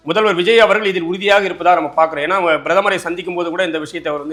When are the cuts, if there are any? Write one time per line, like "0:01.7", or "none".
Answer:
none